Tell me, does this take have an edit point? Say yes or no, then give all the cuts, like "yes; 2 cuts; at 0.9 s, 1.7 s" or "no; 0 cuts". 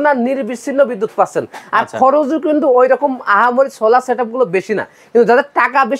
no; 0 cuts